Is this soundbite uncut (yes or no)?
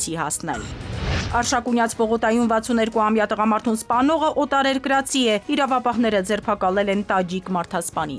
yes